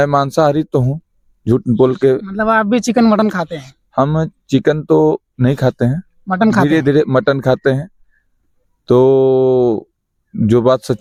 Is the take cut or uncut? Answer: uncut